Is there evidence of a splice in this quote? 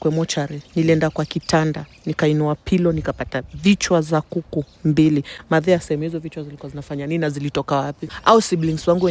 yes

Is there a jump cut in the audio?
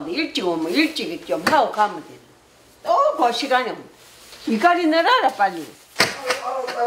no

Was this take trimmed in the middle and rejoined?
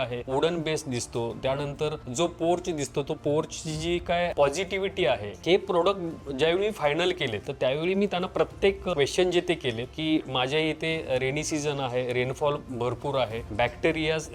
yes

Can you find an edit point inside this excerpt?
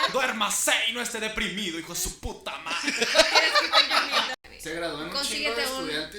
yes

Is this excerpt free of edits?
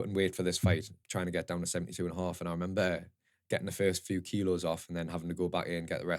no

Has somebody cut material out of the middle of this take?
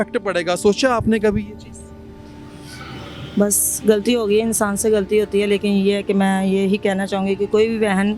no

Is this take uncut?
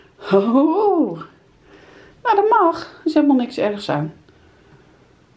yes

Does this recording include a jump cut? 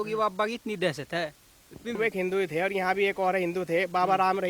yes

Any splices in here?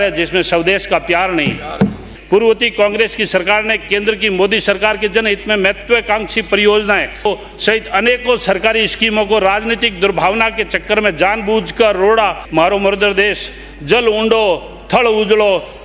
yes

